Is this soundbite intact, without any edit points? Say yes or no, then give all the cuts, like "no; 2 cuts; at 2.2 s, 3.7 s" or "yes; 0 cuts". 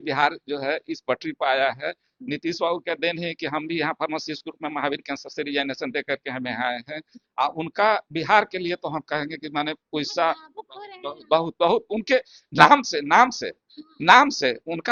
yes; 0 cuts